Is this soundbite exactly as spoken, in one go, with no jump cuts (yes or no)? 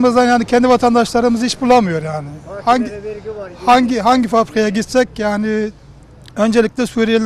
yes